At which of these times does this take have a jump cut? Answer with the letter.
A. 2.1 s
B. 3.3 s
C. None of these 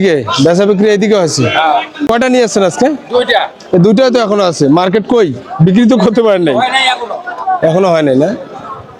A